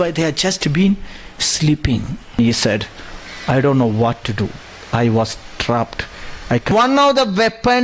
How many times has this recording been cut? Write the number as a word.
two